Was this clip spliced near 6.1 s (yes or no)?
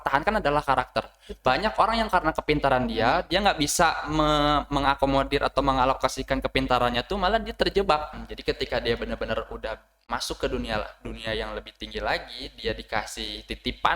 no